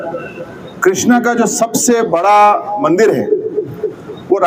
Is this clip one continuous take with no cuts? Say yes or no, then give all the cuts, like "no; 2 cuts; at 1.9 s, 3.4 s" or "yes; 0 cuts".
yes; 0 cuts